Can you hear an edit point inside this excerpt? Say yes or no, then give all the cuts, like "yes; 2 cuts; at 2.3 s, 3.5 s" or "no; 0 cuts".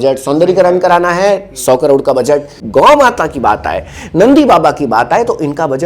yes; 1 cut; at 2.6 s